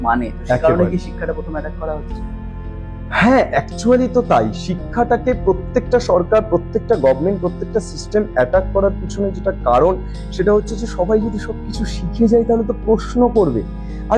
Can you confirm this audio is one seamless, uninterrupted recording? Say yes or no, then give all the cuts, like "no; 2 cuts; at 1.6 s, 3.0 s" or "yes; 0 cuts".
yes; 0 cuts